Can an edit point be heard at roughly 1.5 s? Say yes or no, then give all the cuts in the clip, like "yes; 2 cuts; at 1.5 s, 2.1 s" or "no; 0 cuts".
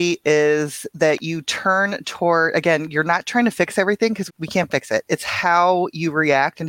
no; 1 cut; at 4.2 s